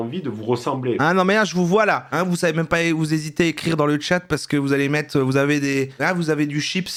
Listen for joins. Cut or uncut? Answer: uncut